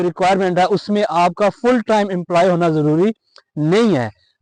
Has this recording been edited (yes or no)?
no